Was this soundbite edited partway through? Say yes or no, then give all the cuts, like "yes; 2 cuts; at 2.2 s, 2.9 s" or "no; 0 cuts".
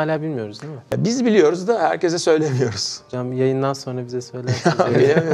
yes; 1 cut; at 0.9 s